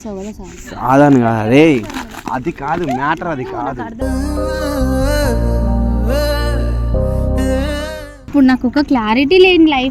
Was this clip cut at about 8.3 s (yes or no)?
yes